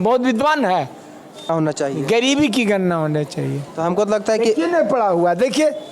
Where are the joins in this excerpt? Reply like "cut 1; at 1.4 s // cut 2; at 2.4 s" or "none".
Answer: cut 1; at 1.5 s